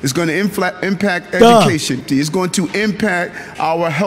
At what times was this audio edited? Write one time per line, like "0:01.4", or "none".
0:02.0